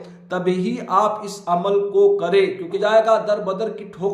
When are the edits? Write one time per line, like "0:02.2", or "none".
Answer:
0:02.8